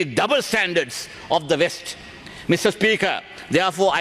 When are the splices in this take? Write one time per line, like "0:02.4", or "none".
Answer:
none